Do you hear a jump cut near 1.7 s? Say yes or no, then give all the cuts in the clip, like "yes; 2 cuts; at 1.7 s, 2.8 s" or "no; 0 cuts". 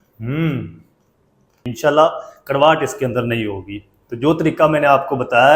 yes; 1 cut; at 1.7 s